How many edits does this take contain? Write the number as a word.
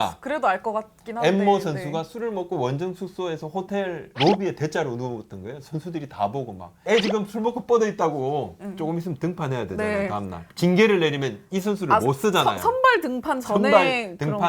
one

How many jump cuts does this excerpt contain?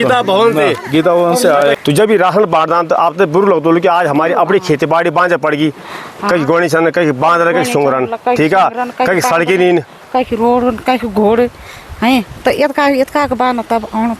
one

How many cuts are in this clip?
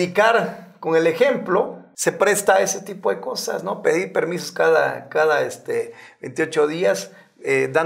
one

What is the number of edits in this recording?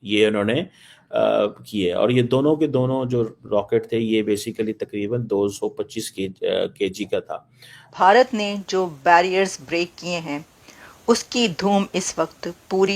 one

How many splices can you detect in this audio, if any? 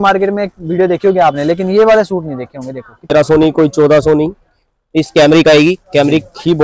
one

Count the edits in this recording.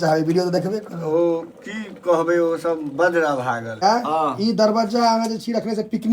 one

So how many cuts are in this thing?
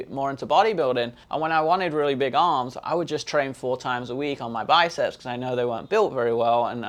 one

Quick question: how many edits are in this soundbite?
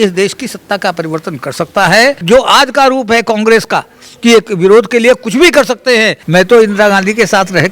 two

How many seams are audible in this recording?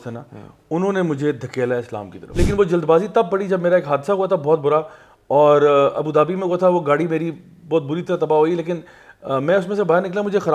one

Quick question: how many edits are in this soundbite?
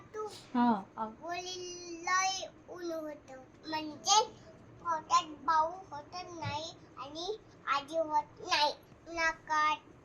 two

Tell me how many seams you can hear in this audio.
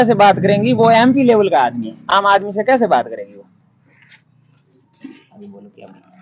zero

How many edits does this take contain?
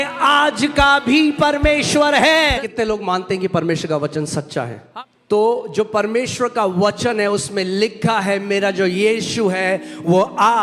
two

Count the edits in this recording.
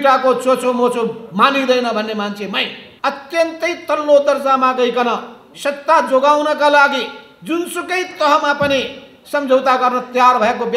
one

